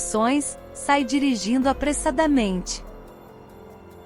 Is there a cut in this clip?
yes; 1 cut; at 2.6 s

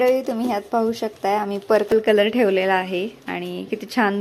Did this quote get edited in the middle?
yes; 1 cut; at 1.9 s

